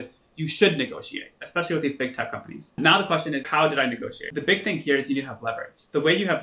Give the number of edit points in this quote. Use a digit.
0